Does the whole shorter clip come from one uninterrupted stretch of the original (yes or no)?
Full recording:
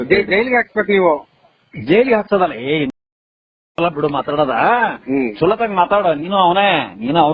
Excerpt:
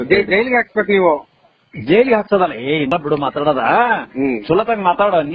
no